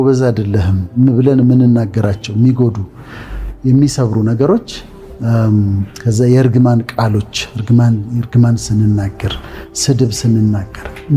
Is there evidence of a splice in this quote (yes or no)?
no